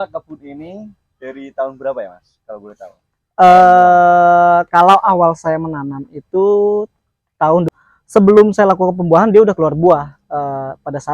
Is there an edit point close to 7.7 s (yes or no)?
yes